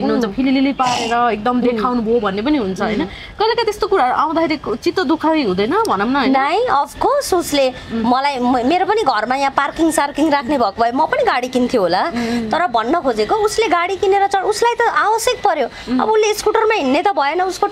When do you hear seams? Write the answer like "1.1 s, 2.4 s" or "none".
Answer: none

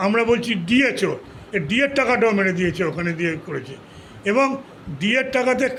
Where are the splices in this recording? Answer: none

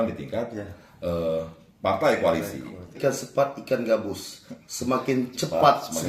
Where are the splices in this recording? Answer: 2.9 s

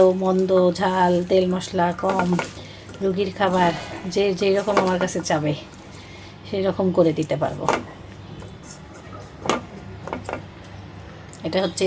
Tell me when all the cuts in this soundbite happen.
none

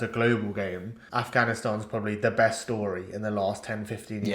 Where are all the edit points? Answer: 1.0 s

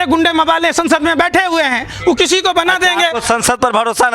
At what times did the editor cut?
none

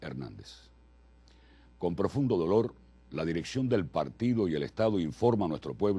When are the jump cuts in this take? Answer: 3.7 s

